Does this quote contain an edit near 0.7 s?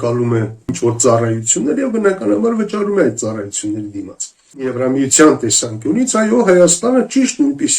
yes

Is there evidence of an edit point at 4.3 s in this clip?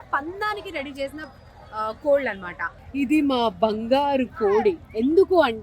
no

